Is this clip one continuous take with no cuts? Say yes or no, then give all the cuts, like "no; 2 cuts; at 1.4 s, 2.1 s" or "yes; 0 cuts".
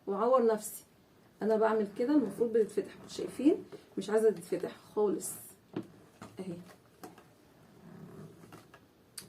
yes; 0 cuts